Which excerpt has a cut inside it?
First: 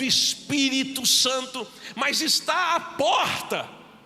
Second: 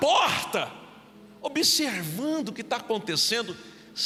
first; 1 cut; at 1.8 s

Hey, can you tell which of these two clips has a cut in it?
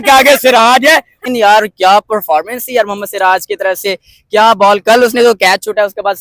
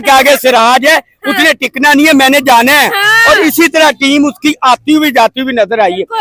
first; 1 cut; at 1.2 s

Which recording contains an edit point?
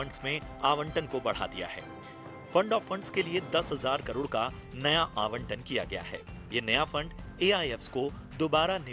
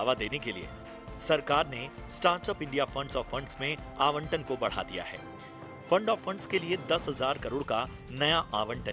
first; 1 cut; at 7.6 s

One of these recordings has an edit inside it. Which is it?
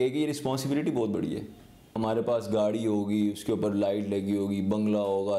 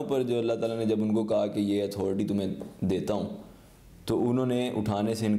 first; 1 cut; at 2.0 s

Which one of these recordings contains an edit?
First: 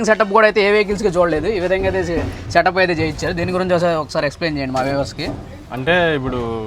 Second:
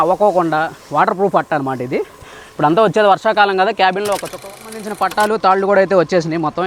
second; 1 cut; at 4.4 s

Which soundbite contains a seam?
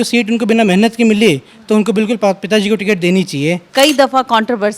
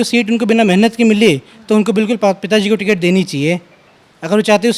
first; 1 cut; at 3.6 s

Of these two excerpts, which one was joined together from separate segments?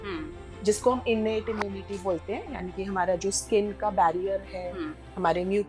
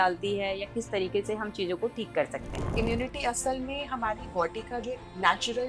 second; 1 cut; at 2.8 s

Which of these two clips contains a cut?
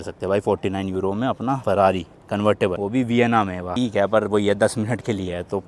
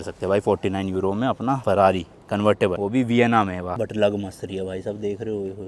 second; 1 cut; at 3.7 s

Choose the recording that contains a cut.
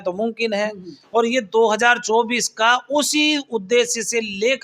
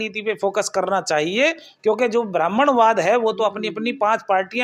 first; 1 cut; at 0.9 s

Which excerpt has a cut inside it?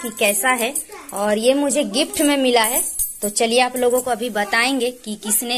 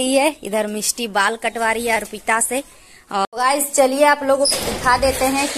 second; 1 cut; at 3.3 s

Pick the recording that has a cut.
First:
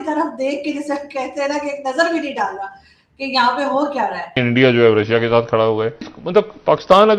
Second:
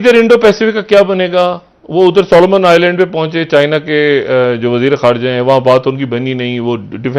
first; 2 cuts; at 4.4 s, 6.1 s

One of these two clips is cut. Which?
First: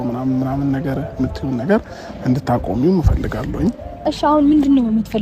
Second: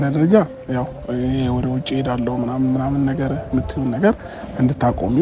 first; 1 cut; at 4.1 s

